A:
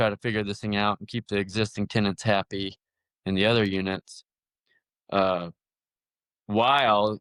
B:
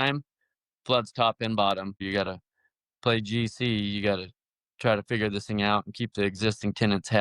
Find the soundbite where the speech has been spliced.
B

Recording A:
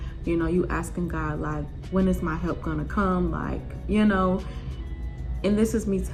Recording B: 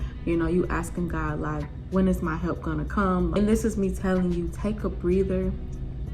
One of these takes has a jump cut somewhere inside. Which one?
B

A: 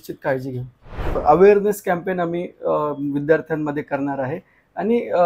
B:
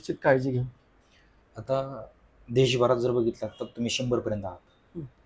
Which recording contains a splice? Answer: A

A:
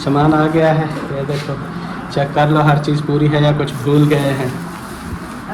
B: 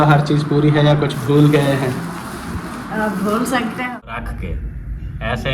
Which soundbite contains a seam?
B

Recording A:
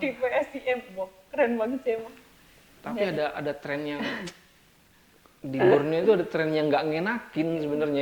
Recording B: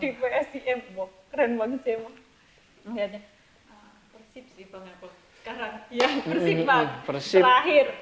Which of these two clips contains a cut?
A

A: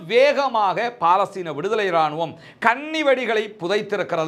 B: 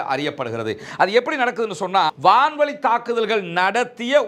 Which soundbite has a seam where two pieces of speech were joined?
B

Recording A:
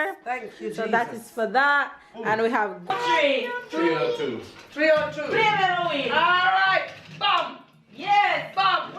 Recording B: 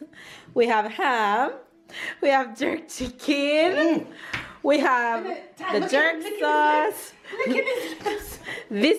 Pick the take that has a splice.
A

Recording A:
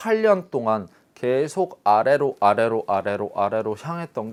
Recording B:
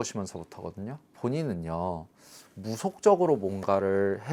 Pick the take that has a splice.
B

